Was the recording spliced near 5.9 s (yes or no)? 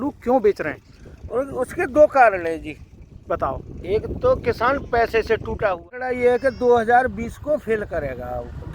yes